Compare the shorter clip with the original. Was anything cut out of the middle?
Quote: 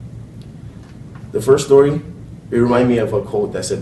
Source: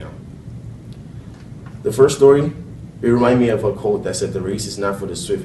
no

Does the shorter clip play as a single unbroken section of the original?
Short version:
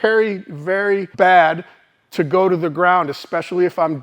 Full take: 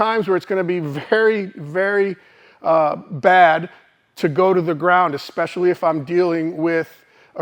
no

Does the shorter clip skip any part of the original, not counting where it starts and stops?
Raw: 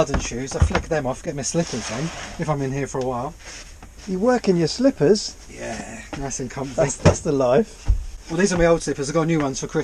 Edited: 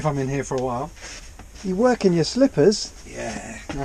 no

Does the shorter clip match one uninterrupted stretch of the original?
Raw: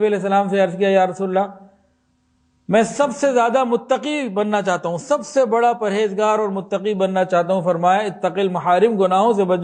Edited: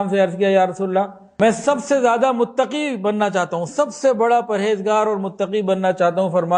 no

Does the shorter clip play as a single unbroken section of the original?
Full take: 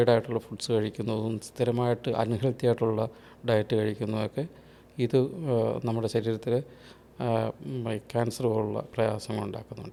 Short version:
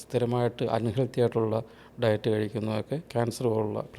no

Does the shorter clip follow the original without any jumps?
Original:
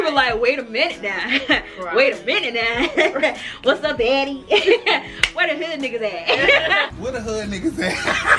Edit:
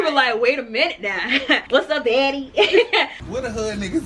no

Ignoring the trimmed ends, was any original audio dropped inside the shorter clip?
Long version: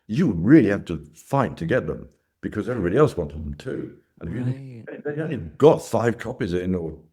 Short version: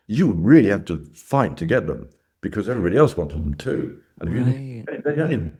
no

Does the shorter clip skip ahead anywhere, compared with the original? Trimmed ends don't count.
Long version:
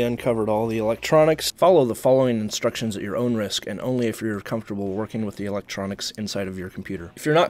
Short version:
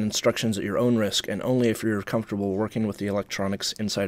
no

